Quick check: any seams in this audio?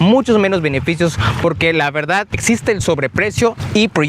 yes; 1 cut; at 2.3 s

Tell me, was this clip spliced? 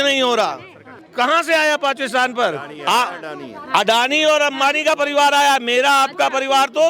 yes; 1 cut; at 1.0 s

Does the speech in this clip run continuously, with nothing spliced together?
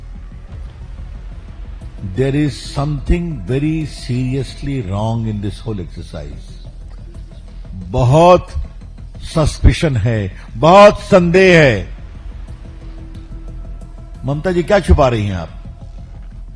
no; 2 cuts; at 12.4 s, 14.2 s

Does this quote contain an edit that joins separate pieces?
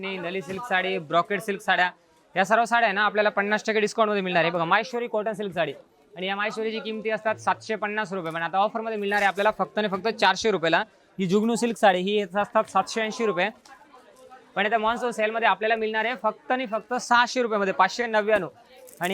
no; 0 cuts

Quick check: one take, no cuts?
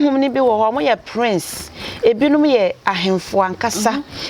yes; 0 cuts

